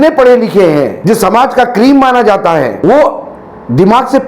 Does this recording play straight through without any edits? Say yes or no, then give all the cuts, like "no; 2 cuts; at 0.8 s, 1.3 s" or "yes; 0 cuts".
no; 2 cuts; at 1.0 s, 2.8 s